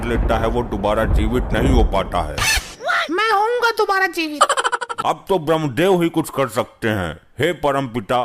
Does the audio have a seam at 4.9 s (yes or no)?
yes